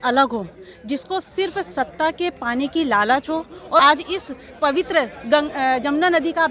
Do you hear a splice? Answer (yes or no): yes